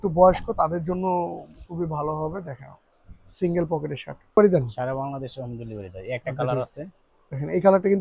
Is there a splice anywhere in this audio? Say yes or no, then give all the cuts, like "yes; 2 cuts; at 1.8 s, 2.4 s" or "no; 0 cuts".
yes; 1 cut; at 4.4 s